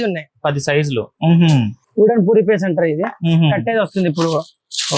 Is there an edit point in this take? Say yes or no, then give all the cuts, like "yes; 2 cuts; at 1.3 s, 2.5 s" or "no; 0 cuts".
yes; 1 cut; at 1.8 s